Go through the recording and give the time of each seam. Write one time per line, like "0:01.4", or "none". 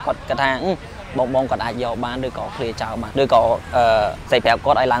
0:03.1
0:04.2